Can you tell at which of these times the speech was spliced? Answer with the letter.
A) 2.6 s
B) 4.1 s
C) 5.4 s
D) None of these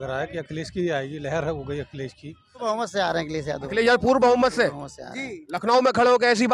A